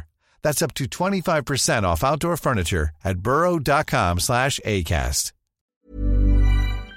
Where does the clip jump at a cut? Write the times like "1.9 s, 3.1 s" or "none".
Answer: 5.6 s